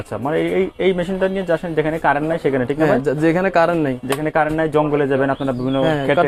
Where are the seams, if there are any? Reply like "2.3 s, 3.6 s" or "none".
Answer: none